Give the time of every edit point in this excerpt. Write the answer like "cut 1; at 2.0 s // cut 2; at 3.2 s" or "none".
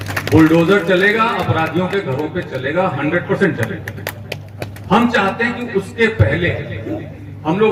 none